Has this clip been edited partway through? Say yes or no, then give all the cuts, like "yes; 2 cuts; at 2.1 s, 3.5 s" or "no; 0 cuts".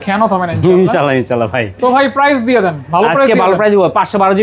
no; 0 cuts